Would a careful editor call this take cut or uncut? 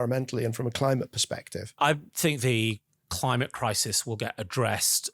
cut